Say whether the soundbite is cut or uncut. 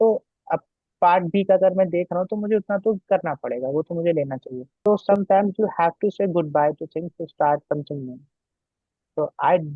cut